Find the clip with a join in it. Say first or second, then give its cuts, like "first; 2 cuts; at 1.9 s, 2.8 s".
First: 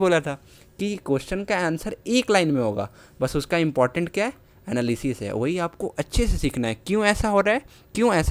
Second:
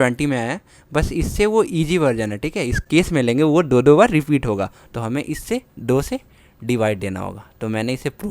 second; 1 cut; at 2.8 s